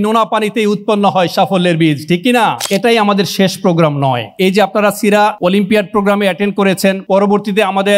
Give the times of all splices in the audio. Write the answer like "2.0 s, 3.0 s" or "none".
2.6 s